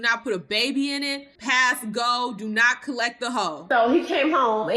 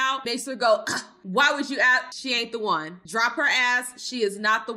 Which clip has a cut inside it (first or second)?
first